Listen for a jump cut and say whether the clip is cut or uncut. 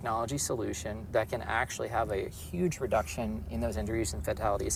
uncut